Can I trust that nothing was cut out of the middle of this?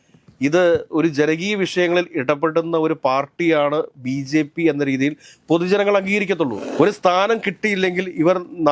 no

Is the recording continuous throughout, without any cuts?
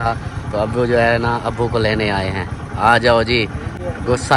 yes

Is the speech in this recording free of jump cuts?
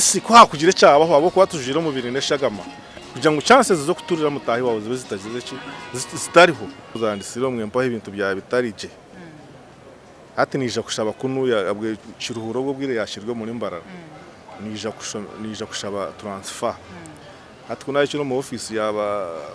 no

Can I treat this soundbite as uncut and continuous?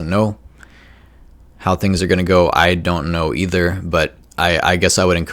no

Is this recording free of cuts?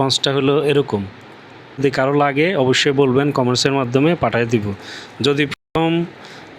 no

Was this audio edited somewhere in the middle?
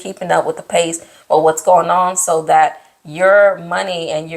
no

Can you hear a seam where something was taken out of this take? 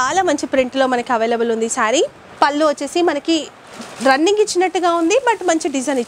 yes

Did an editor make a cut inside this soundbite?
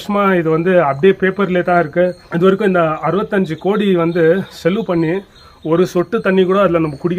yes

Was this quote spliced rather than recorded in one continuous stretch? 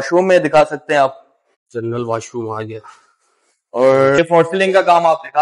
yes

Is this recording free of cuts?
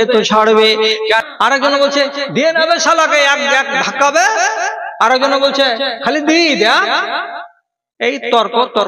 no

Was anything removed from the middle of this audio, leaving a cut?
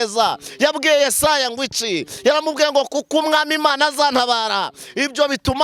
no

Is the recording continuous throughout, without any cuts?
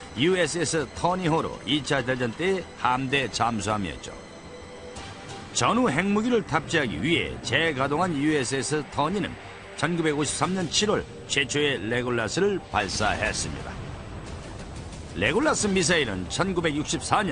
no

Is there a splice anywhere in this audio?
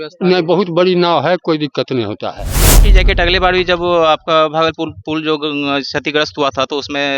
yes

